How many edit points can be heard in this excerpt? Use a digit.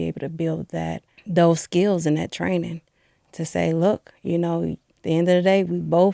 2